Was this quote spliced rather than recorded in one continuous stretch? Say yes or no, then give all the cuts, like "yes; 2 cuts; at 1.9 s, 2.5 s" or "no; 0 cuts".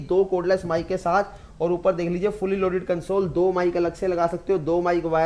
no; 0 cuts